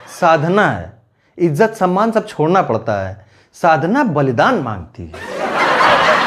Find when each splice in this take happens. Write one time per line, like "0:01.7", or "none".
0:05.2